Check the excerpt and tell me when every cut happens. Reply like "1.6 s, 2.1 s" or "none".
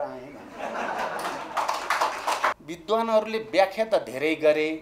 2.7 s